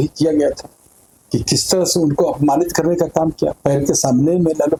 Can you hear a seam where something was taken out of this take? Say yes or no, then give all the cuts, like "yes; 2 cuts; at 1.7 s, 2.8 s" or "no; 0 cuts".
no; 0 cuts